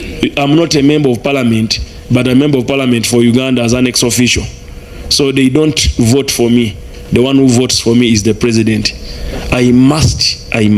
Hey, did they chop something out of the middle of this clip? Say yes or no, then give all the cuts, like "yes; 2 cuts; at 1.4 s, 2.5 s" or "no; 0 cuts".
no; 0 cuts